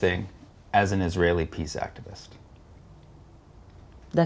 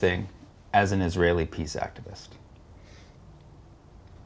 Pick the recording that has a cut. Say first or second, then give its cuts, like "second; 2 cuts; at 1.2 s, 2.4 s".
first; 1 cut; at 2.8 s